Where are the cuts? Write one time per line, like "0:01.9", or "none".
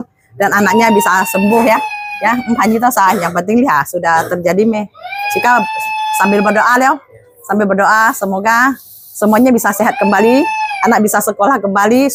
none